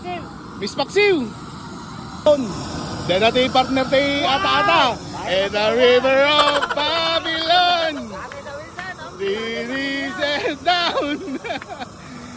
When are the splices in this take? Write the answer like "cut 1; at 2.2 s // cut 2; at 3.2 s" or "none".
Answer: cut 1; at 2.3 s